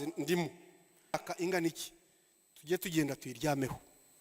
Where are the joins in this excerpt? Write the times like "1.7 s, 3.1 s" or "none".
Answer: 1.1 s